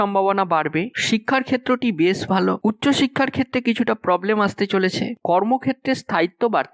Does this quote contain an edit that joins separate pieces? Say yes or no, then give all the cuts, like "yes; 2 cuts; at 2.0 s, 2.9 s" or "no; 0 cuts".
yes; 2 cuts; at 0.9 s, 5.1 s